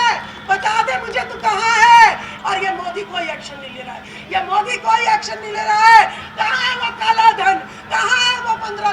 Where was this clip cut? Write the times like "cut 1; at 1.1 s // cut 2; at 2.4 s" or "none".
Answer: cut 1; at 2.3 s